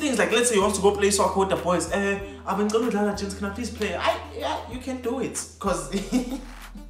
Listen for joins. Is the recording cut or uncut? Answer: uncut